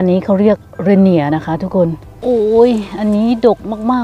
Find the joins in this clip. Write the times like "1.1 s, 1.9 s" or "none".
2.1 s